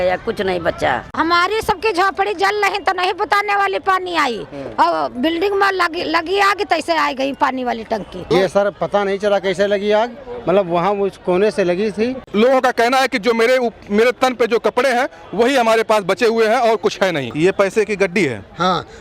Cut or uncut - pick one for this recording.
cut